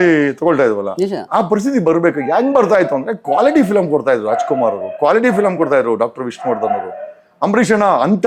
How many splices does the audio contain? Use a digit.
0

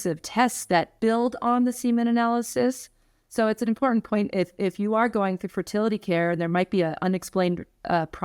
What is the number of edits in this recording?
1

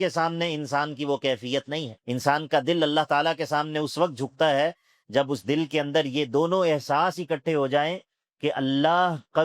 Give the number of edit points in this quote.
1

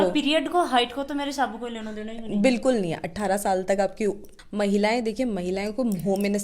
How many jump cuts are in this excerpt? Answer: 1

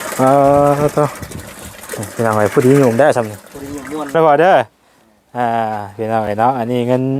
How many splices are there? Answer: 1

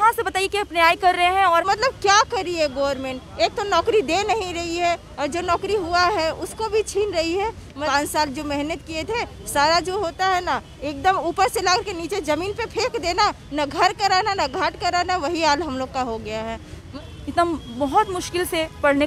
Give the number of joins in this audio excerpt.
3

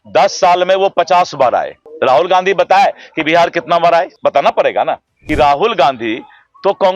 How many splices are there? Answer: 3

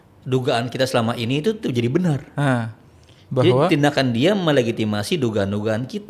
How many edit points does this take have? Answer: 0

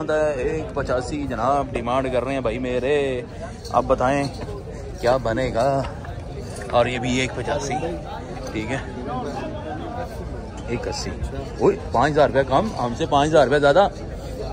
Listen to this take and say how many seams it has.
0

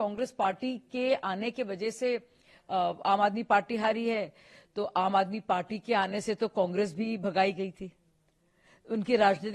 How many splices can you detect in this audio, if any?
0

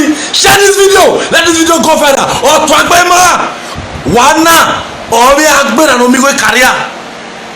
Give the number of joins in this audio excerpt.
1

